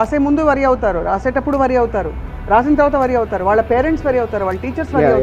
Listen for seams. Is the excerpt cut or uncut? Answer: uncut